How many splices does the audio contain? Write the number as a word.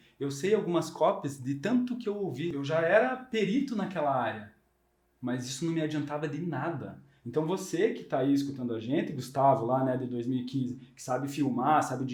one